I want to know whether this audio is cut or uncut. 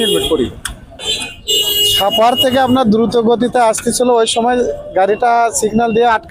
cut